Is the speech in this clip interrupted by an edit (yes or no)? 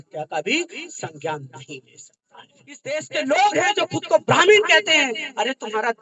yes